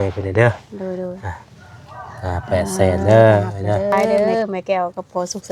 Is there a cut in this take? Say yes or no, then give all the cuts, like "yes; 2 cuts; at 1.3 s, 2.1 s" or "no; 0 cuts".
yes; 1 cut; at 4.0 s